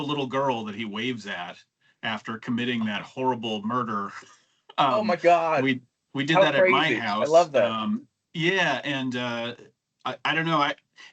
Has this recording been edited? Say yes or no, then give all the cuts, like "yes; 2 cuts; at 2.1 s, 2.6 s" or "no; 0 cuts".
no; 0 cuts